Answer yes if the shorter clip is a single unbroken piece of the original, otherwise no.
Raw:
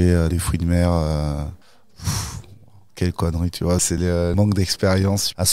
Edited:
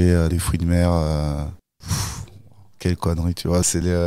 no